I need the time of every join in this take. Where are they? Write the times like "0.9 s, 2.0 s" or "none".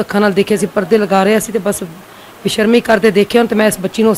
none